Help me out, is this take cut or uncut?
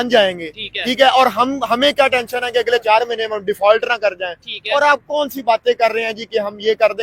uncut